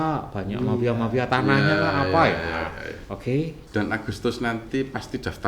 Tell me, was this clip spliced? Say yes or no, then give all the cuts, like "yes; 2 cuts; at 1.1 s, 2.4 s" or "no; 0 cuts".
yes; 1 cut; at 3.6 s